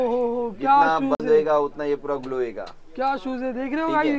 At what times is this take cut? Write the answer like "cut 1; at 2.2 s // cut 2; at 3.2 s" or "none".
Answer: none

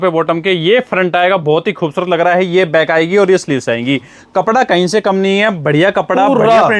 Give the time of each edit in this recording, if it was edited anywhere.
none

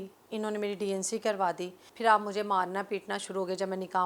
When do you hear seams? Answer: cut 1; at 1.8 s

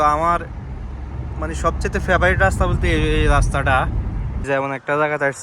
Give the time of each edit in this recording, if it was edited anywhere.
cut 1; at 4.5 s

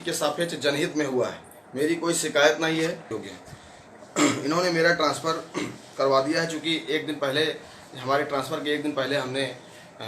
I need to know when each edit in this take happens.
cut 1; at 3.2 s

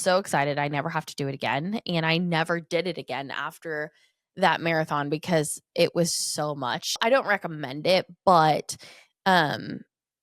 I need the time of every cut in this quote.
cut 1; at 7.0 s

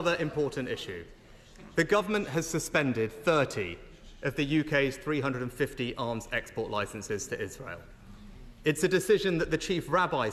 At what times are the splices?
none

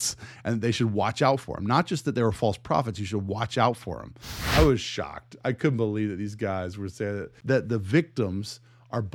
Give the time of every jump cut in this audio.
cut 1; at 4.5 s // cut 2; at 7.3 s

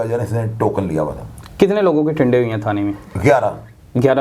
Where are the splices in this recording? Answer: none

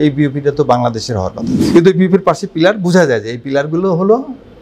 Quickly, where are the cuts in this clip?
cut 1; at 1.6 s

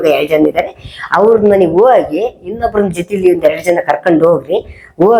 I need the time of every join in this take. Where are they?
none

